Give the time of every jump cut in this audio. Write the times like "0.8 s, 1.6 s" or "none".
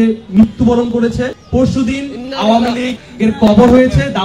1.4 s, 3.0 s

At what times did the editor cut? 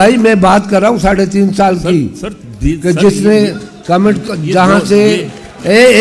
none

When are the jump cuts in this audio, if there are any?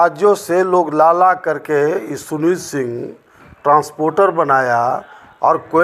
none

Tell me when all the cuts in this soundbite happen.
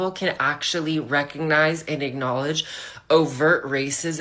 1.6 s

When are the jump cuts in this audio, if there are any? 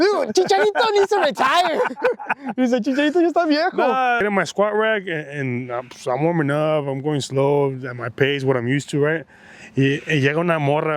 4.2 s

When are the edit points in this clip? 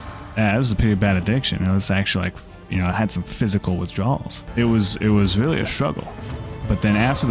4.4 s

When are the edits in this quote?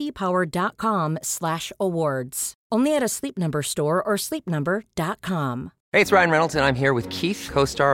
5.7 s

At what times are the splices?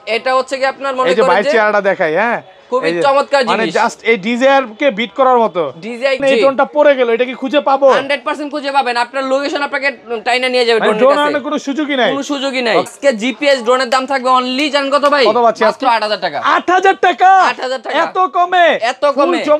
6.2 s, 12.9 s

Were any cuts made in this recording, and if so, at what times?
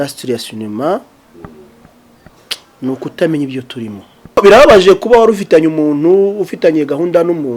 4.4 s

